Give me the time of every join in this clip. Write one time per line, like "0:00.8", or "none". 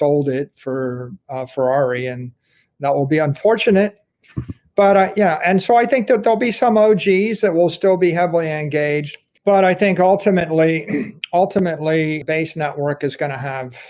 0:11.2
0:12.2